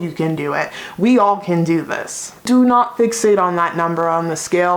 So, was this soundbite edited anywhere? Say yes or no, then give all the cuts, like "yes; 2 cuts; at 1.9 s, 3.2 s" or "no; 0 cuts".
yes; 1 cut; at 2.5 s